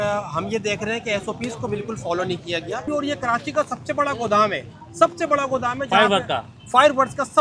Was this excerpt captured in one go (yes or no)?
no